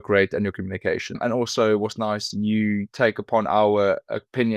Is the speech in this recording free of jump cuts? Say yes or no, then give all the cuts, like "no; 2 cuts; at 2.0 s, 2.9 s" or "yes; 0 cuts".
no; 1 cut; at 1.2 s